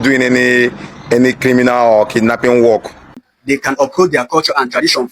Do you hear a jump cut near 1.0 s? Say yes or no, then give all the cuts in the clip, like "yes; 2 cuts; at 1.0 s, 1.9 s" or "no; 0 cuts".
no; 1 cut; at 3.3 s